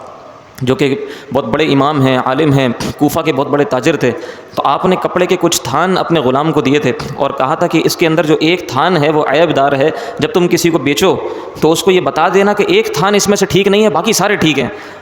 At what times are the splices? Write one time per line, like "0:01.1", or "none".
none